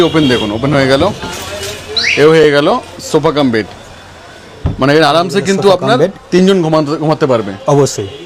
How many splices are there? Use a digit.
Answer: 0